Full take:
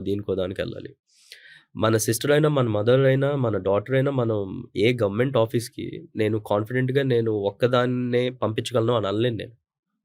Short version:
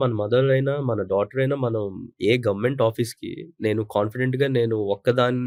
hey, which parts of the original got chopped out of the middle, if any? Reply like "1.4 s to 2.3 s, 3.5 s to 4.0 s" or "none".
none